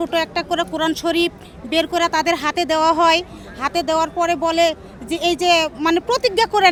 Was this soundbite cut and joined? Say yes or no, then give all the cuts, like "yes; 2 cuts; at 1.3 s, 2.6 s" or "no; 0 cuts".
no; 0 cuts